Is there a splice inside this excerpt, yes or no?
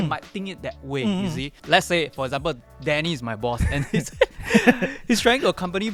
no